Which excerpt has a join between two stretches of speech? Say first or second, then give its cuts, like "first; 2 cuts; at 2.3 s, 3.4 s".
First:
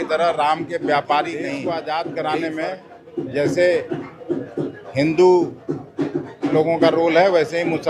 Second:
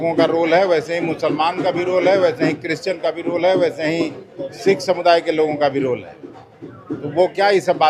first; 1 cut; at 1.6 s